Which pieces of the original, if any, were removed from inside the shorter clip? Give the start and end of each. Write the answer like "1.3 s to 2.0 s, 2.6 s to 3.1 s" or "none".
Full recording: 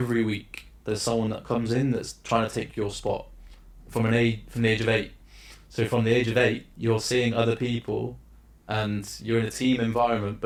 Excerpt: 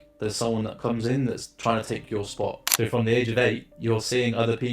3.3 s to 5.6 s